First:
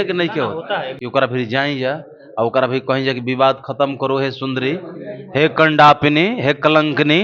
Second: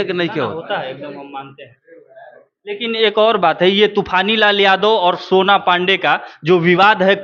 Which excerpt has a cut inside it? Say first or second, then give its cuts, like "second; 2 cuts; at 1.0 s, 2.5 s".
first; 1 cut; at 1.0 s